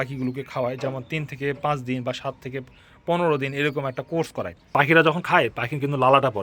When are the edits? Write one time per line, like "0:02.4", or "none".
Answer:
0:04.7